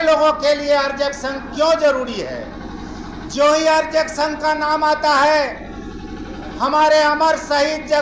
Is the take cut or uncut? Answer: uncut